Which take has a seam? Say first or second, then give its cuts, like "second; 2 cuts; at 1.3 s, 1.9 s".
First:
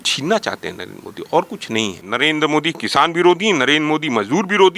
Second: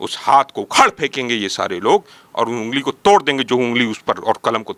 first; 1 cut; at 2.0 s